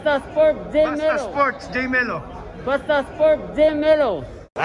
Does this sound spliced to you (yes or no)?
yes